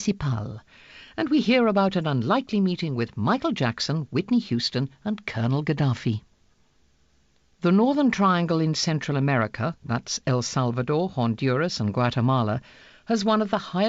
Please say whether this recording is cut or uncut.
cut